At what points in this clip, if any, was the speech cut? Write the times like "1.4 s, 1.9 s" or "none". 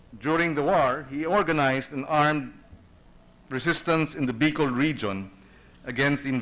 4.7 s